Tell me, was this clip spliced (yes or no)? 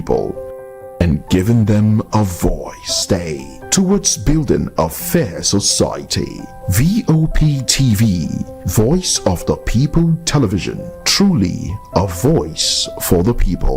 yes